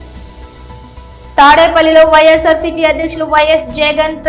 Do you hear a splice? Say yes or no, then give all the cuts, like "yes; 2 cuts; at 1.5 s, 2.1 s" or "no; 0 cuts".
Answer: yes; 1 cut; at 1.3 s